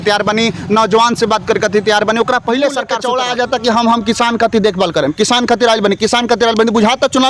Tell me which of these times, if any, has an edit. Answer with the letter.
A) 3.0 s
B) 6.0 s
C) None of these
A